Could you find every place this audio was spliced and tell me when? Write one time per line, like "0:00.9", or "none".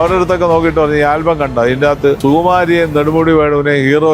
0:02.2